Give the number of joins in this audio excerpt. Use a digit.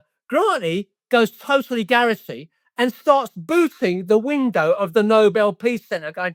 0